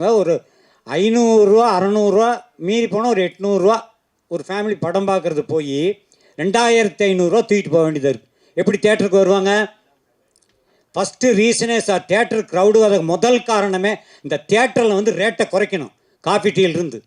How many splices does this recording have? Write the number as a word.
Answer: zero